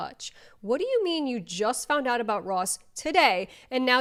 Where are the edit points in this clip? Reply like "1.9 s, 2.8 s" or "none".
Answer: none